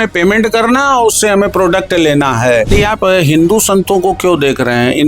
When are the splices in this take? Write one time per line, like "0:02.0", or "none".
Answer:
0:02.7